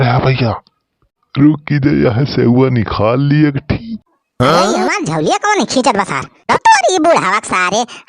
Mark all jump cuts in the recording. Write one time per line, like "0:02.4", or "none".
0:06.4